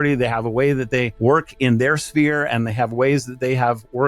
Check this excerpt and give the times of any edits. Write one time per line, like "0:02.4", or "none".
0:01.1